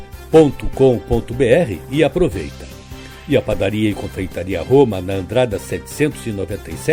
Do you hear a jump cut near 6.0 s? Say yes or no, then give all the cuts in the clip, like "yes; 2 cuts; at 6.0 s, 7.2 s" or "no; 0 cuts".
no; 0 cuts